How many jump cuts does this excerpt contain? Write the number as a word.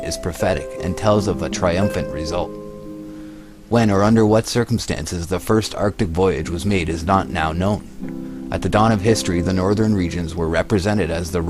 one